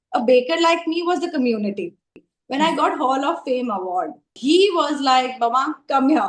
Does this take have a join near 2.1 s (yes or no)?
yes